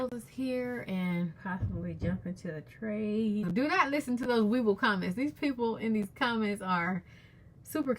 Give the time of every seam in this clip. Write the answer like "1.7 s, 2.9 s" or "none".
3.5 s